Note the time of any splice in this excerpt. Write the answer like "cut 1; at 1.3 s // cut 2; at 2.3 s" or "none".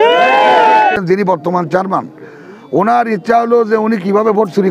cut 1; at 1.0 s